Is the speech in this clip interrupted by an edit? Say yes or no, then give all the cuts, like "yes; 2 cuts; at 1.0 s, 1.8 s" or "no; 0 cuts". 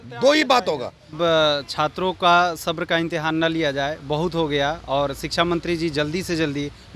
yes; 1 cut; at 1.1 s